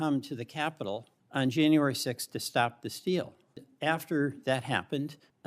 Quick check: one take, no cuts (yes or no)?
no